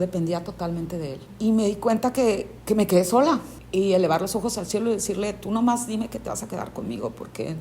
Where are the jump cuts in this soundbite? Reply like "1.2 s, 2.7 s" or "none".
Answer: 1.2 s, 2.5 s, 3.6 s